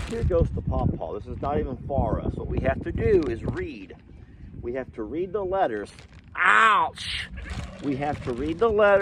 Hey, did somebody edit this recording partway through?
no; 0 cuts

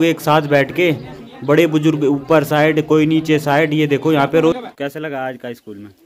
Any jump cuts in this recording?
yes; 1 cut; at 4.5 s

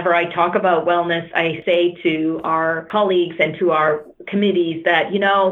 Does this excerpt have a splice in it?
yes; 2 cuts; at 1.6 s, 2.9 s

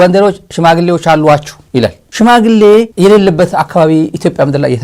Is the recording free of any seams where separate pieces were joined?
no; 2 cuts; at 1.8 s, 2.9 s

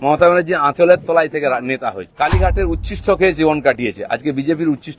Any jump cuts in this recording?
yes; 1 cut; at 2.0 s

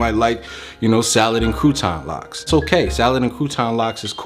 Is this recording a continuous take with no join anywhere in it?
no; 1 cut; at 2.5 s

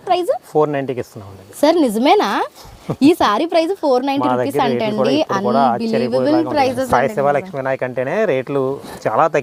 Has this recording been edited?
no; 0 cuts

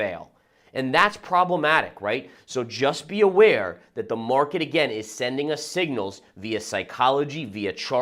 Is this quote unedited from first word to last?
no; 1 cut; at 2.3 s

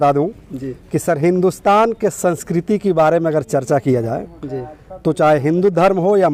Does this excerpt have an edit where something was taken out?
no; 0 cuts

